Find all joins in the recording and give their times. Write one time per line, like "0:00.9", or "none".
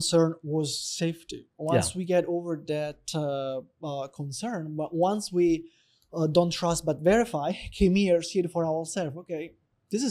none